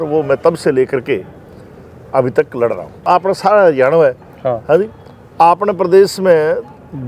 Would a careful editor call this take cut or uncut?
cut